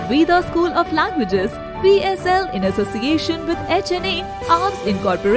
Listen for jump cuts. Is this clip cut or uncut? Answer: uncut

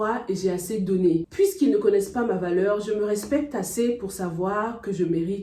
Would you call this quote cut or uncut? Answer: uncut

